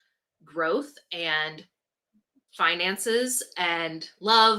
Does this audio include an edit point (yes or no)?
no